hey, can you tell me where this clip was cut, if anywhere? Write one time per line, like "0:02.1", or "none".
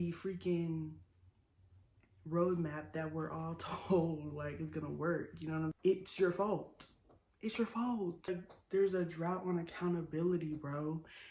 0:05.8
0:08.3